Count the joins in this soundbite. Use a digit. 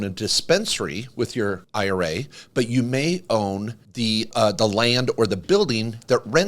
2